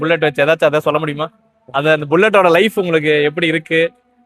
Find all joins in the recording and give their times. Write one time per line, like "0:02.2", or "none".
none